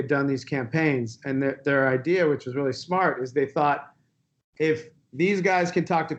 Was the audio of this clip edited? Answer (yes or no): no